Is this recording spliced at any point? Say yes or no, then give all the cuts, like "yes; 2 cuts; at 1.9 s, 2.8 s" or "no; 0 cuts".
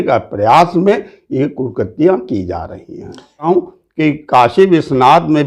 yes; 1 cut; at 3.5 s